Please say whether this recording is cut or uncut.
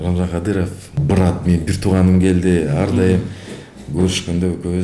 cut